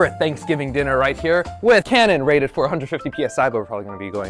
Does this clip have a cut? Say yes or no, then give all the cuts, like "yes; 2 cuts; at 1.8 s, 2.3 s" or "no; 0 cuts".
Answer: yes; 1 cut; at 1.9 s